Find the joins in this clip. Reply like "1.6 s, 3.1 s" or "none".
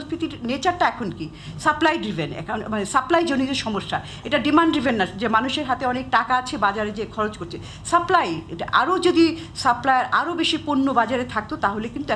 none